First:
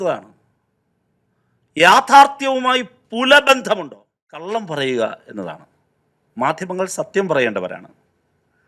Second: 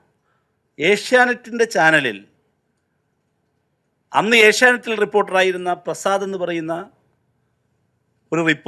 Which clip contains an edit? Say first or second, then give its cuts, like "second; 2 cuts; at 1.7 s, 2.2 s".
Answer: first; 1 cut; at 4.4 s